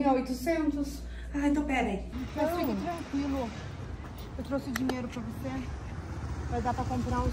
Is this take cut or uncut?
cut